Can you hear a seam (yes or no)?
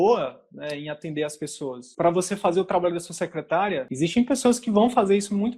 yes